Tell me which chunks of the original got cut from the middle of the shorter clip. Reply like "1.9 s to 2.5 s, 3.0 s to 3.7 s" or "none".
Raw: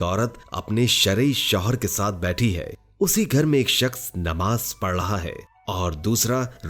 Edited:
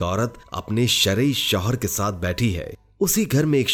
none